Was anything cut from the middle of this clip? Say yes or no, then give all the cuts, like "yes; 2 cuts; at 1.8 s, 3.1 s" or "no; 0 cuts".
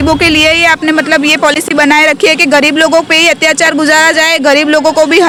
no; 0 cuts